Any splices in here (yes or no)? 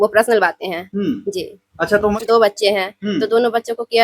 yes